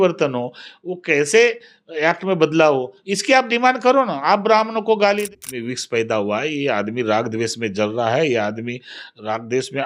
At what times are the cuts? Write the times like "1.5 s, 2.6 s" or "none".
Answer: 5.2 s